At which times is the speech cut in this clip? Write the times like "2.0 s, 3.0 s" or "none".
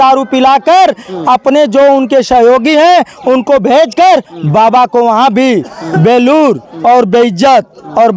none